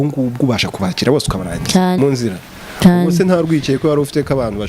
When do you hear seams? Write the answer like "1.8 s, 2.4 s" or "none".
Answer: 2.0 s